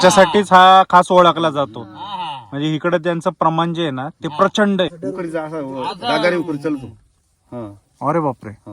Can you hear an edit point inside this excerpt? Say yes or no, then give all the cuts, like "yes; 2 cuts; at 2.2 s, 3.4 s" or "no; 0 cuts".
yes; 1 cut; at 5.0 s